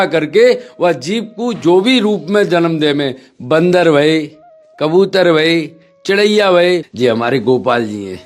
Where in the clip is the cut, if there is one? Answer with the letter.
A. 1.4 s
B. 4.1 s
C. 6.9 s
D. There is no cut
C